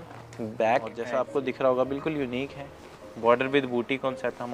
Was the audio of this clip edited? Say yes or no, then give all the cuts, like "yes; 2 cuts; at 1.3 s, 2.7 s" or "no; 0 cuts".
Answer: yes; 1 cut; at 1.0 s